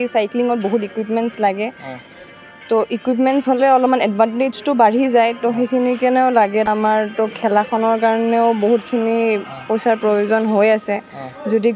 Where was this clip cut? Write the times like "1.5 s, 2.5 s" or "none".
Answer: 6.7 s